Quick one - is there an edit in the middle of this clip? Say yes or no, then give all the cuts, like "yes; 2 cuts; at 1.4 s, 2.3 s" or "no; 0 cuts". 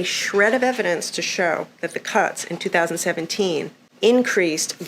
yes; 1 cut; at 3.8 s